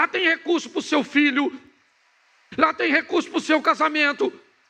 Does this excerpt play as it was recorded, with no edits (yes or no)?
yes